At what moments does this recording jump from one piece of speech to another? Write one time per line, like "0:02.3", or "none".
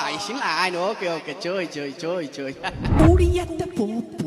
0:03.0